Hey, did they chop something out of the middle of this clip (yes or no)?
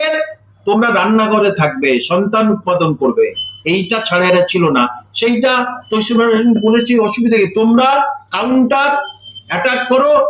no